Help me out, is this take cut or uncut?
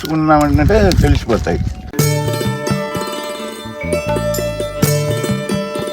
cut